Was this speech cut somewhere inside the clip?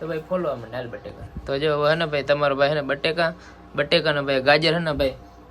no; 0 cuts

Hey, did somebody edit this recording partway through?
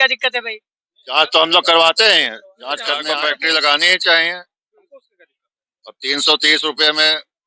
yes; 1 cut; at 3.0 s

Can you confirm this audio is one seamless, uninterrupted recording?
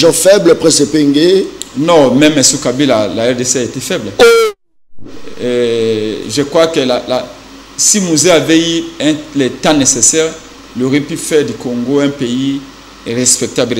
yes; 0 cuts

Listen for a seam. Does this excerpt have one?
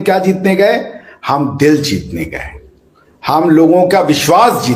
no; 0 cuts

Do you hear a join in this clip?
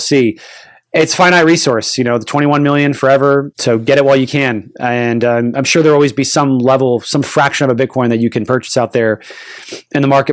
no; 0 cuts

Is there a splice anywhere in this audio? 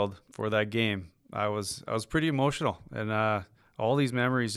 no; 0 cuts

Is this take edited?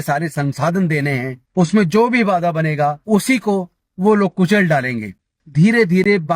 yes; 3 cuts; at 1.4 s, 3.0 s, 5.4 s

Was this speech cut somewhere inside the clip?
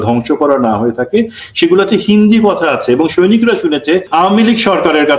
yes; 1 cut; at 4.1 s

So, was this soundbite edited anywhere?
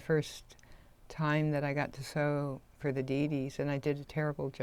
no; 0 cuts

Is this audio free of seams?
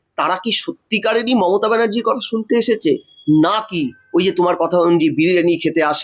yes; 0 cuts

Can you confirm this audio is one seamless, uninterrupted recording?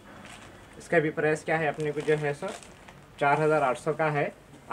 yes; 0 cuts

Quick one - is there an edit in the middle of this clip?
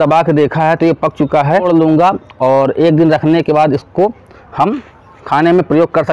yes; 1 cut; at 1.6 s

